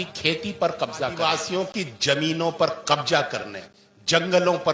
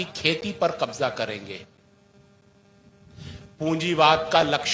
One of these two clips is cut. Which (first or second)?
first